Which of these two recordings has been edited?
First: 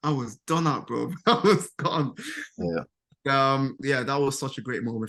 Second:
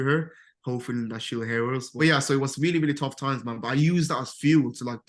second; 1 cut; at 1.9 s

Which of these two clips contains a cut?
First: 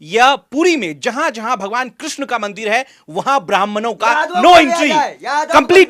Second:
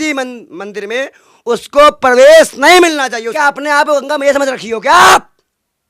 second; 1 cut; at 3.3 s

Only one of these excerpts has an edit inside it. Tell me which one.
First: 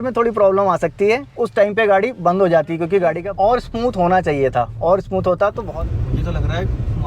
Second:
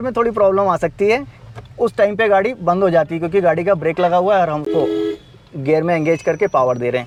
first; 3 cuts; at 1.3 s, 3.2 s, 5.6 s

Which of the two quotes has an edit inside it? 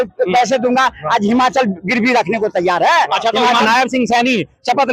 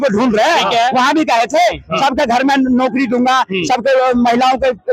first; 1 cut; at 3.6 s

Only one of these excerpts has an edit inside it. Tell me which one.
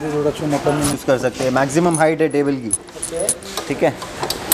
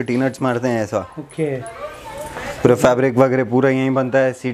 first; 1 cut; at 1.0 s

